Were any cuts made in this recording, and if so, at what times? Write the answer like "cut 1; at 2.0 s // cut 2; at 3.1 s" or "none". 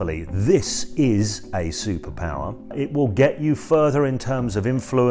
cut 1; at 2.7 s